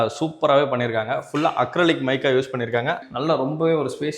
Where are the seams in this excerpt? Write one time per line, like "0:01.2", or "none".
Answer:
0:03.0